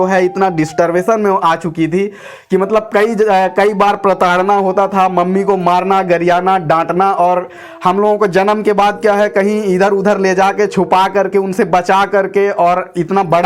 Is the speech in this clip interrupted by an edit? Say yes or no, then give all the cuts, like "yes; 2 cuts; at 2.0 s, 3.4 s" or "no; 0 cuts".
no; 0 cuts